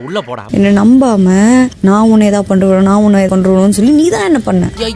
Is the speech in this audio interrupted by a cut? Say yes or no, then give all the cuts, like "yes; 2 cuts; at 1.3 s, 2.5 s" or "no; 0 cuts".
no; 0 cuts